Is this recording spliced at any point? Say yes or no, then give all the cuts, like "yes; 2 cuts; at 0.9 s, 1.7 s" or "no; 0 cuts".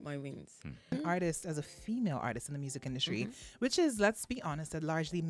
yes; 1 cut; at 0.9 s